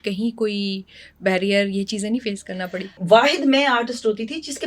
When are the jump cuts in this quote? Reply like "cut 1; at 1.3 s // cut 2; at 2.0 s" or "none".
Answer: cut 1; at 3.0 s